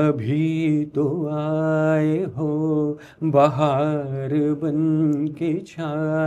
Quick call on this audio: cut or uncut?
uncut